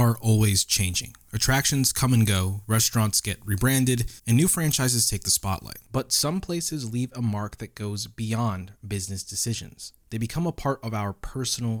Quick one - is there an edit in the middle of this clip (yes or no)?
no